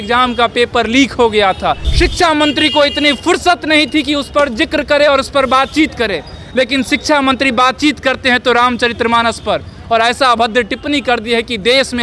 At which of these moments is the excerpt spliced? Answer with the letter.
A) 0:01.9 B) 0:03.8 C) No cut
A